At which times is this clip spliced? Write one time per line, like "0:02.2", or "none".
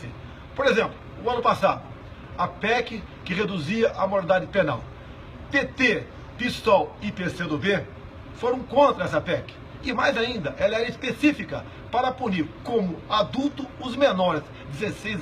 0:07.9